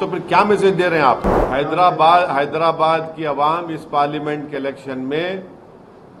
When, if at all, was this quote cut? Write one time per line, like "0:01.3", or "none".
0:01.4